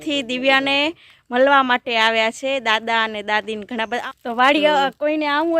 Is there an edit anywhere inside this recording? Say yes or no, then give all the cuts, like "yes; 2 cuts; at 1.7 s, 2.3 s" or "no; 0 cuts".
yes; 1 cut; at 4.0 s